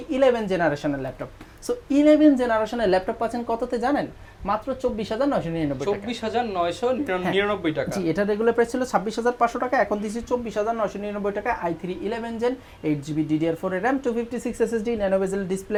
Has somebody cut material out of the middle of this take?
no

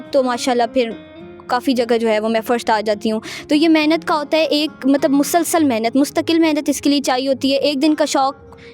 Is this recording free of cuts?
yes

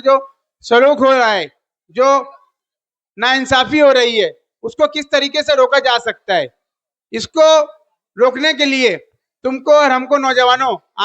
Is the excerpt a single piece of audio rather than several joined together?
yes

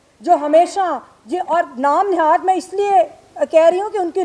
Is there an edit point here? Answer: no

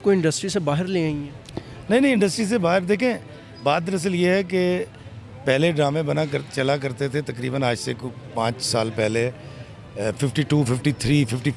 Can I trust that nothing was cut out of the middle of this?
yes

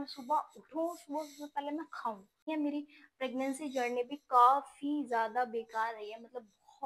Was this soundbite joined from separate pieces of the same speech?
yes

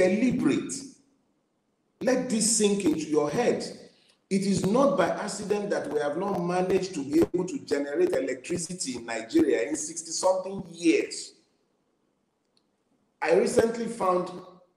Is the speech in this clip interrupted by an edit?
no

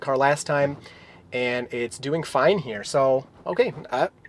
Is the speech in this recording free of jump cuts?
yes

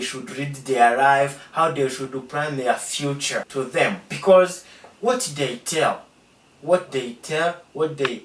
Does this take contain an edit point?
yes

